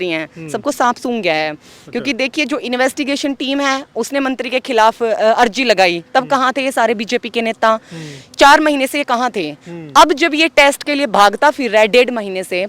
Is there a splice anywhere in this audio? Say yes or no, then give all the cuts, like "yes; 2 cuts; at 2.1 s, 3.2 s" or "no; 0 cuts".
no; 0 cuts